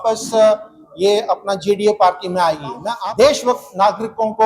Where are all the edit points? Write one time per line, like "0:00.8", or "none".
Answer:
0:02.9